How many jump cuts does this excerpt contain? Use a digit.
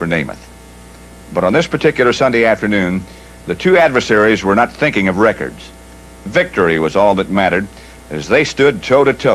1